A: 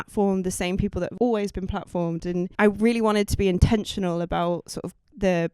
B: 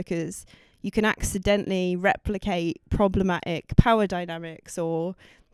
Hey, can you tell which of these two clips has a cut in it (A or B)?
A